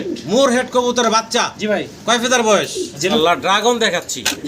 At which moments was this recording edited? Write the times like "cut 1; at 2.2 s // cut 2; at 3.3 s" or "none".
cut 1; at 3.1 s